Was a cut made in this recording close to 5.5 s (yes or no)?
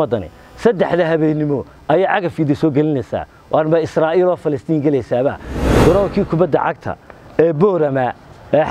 yes